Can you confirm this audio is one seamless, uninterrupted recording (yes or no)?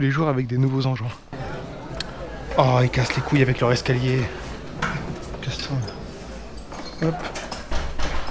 no